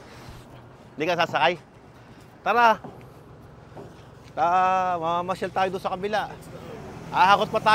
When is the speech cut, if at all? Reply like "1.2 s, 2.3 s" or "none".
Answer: none